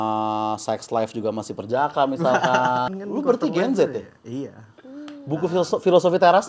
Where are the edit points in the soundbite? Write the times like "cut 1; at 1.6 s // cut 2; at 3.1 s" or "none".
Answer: cut 1; at 2.9 s